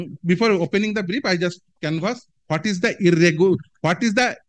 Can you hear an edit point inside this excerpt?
no; 0 cuts

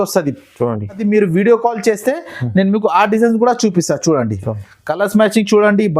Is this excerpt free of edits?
no; 1 cut; at 1.0 s

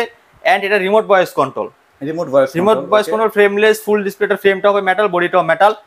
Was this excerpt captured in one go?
yes; 0 cuts

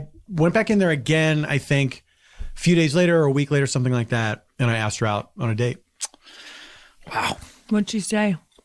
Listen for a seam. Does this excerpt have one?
no; 0 cuts

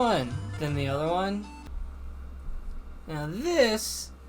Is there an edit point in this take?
yes; 1 cut; at 1.6 s

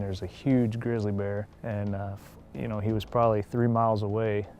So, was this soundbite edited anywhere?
yes; 1 cut; at 1.6 s

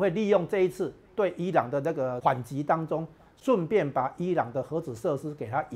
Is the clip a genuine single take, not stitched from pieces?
no; 1 cut; at 2.2 s

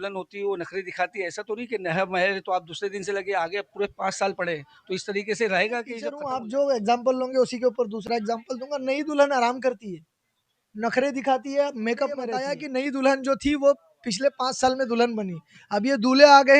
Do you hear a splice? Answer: yes; 2 cuts; at 6.1 s, 12.6 s

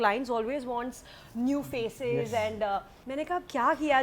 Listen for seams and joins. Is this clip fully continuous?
yes; 0 cuts

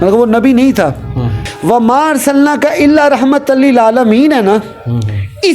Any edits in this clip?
yes; 1 cut; at 1.4 s

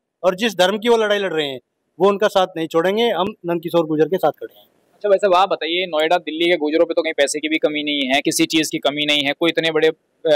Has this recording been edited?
no; 0 cuts

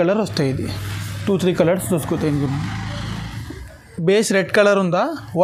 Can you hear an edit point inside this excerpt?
no; 0 cuts

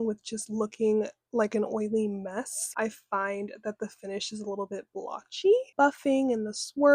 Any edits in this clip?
yes; 2 cuts; at 2.6 s, 5.7 s

